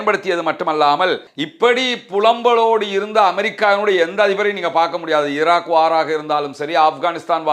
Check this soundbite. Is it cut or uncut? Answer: cut